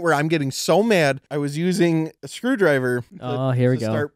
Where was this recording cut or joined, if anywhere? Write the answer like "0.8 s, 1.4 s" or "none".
1.2 s, 2.2 s, 3.2 s